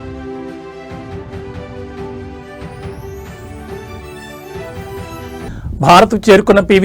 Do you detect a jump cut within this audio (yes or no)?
yes